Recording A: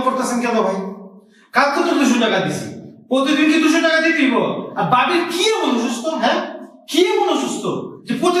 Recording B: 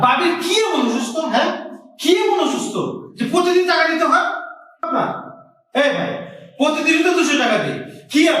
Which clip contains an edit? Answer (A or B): B